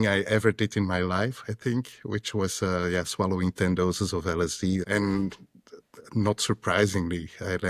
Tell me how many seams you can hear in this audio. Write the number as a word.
one